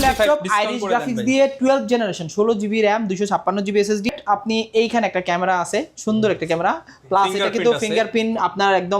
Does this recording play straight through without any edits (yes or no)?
no